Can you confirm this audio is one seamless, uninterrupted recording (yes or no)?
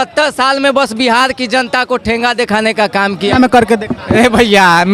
no